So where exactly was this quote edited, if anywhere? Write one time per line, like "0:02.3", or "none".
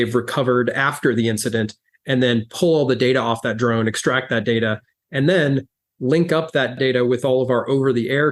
0:06.7